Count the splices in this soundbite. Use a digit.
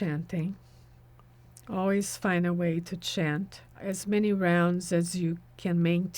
1